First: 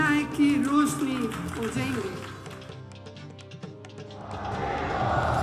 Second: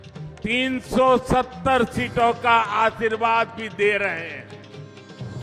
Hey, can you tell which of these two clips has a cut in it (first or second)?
first